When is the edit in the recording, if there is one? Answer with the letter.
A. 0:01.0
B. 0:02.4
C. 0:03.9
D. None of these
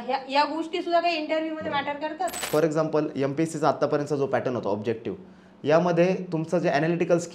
B